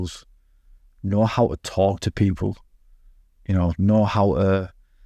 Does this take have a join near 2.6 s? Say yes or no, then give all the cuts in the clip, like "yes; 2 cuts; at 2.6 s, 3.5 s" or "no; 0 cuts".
no; 0 cuts